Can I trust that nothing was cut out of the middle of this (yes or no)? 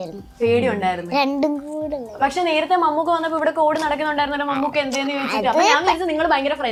yes